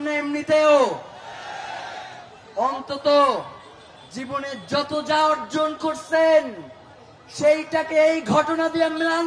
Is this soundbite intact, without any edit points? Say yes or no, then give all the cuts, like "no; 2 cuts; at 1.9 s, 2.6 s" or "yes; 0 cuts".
yes; 0 cuts